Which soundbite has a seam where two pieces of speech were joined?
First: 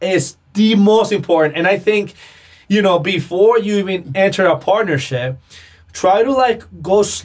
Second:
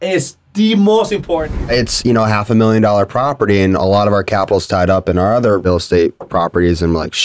second; 2 cuts; at 1.7 s, 5.7 s

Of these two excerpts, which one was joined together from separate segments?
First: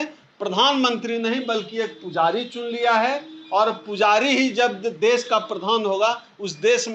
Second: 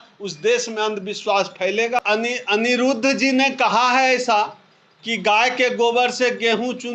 second; 1 cut; at 2.0 s

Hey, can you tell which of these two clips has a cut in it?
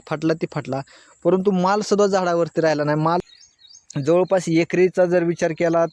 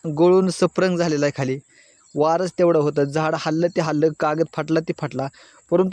first; 1 cut; at 3.2 s

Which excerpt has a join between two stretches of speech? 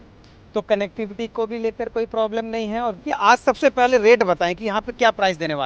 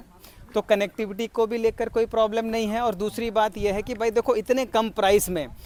first; 1 cut; at 3.0 s

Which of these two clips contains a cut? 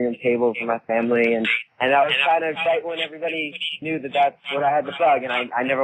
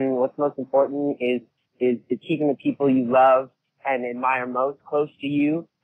first; 1 cut; at 1.6 s

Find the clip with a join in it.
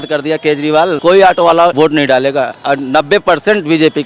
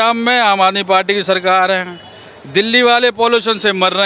first; 2 cuts; at 1.0 s, 1.7 s

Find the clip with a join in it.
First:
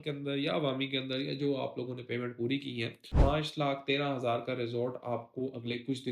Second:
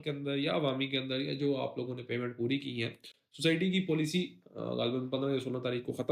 first; 1 cut; at 3.1 s

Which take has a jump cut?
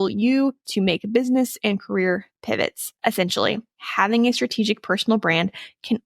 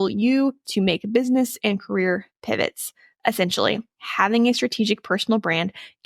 first; 1 cut; at 2.8 s

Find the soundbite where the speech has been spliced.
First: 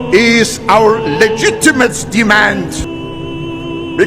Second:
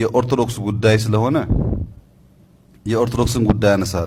first; 1 cut; at 2.8 s

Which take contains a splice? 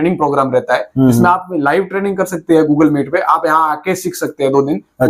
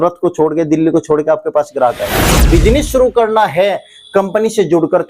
second; 1 cut; at 2.4 s

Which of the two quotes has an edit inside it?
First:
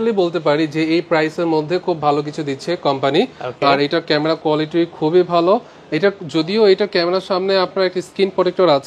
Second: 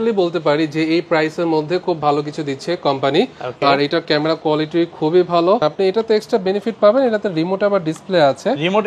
second; 1 cut; at 5.6 s

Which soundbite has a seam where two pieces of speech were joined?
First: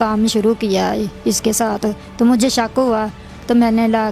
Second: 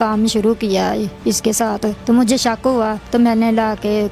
second; 2 cuts; at 2.0 s, 3.0 s

